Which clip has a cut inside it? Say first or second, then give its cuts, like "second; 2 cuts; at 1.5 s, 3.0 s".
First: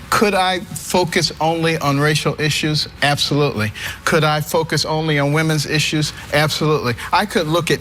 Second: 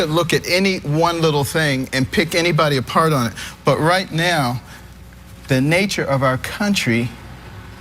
first; 1 cut; at 3.6 s